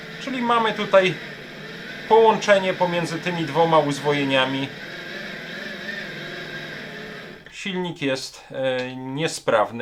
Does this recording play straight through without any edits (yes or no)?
yes